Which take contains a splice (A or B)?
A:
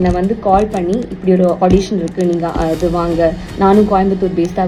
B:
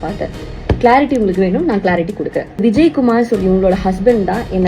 B